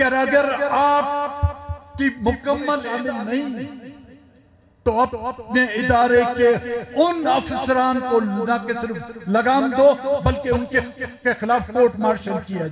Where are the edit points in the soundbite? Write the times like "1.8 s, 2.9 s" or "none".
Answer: 2.9 s